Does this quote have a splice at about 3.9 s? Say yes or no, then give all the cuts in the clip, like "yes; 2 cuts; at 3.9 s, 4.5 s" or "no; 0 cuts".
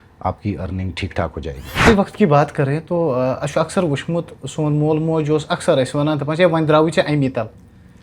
no; 1 cut; at 1.9 s